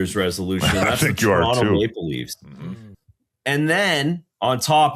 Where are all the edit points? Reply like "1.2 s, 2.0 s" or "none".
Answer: 2.9 s